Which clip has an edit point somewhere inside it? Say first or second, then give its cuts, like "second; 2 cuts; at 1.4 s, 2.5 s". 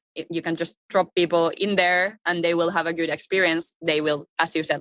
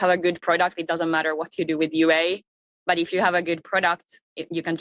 first; 1 cut; at 1.5 s